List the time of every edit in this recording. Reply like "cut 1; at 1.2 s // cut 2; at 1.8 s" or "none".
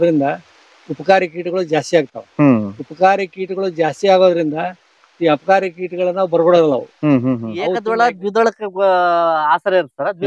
cut 1; at 7.7 s

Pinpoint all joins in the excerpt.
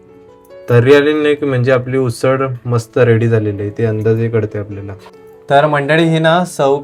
none

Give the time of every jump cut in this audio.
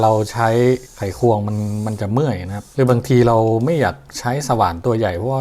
cut 1; at 1.0 s // cut 2; at 2.6 s

